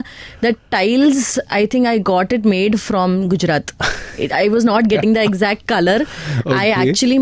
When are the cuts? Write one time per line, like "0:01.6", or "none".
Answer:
none